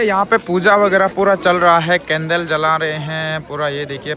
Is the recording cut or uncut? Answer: uncut